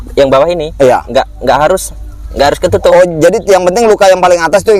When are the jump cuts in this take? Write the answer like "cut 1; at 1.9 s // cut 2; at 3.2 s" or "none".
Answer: none

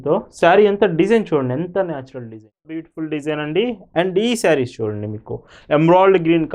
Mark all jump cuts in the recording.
cut 1; at 2.9 s

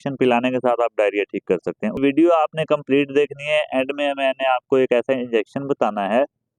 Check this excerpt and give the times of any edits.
cut 1; at 2.0 s

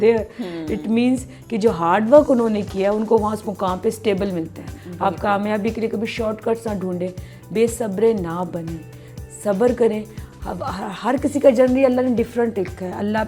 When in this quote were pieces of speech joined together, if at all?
none

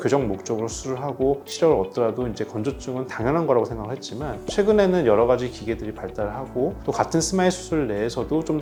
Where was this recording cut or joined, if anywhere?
none

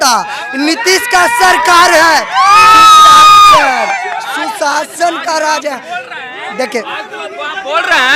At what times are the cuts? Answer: none

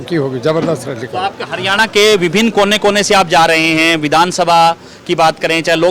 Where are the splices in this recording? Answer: none

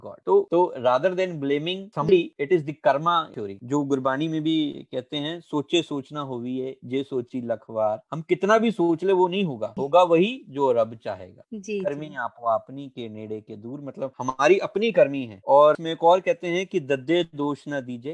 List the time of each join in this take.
cut 1; at 2.1 s // cut 2; at 9.7 s

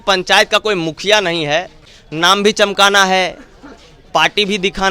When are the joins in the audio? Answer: cut 1; at 1.8 s

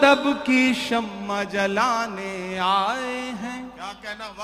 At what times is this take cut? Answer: none

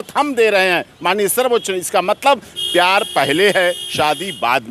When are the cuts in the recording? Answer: none

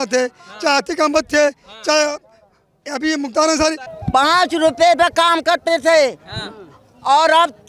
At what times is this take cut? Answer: cut 1; at 3.9 s

